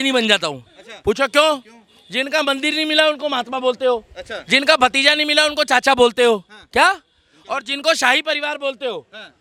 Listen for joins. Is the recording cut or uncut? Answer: uncut